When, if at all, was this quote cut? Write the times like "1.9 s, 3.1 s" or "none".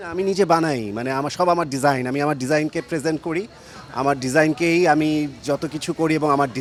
none